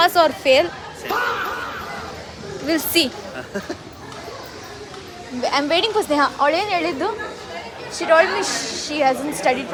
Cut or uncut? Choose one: uncut